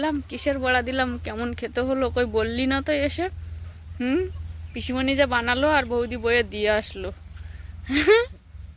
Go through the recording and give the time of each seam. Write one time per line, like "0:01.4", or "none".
none